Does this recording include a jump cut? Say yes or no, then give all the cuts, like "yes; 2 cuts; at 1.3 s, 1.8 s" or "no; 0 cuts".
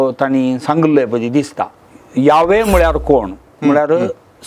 yes; 1 cut; at 1.6 s